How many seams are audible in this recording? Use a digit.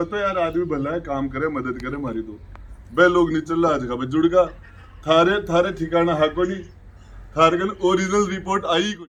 0